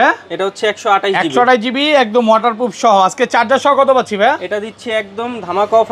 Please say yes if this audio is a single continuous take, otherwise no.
yes